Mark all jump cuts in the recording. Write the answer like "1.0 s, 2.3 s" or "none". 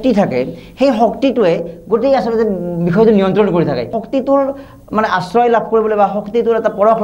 4.0 s